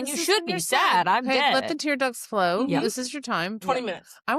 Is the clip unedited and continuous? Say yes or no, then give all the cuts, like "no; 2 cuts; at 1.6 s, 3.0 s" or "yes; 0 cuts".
yes; 0 cuts